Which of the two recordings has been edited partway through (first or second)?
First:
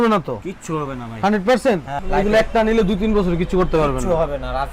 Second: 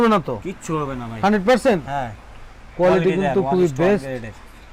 first